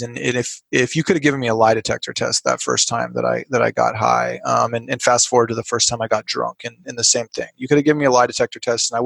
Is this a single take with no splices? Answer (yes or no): yes